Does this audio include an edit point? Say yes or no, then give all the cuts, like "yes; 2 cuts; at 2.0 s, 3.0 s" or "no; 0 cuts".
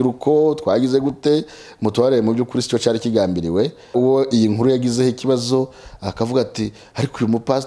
yes; 1 cut; at 3.9 s